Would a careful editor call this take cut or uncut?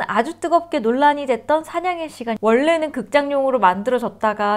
cut